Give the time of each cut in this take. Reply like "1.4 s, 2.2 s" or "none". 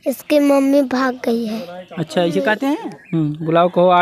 2.9 s